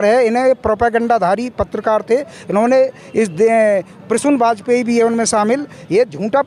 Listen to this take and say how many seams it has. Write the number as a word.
zero